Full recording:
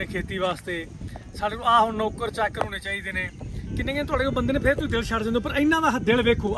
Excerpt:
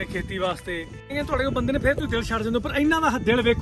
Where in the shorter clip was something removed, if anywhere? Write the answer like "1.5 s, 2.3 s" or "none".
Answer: 1.1 s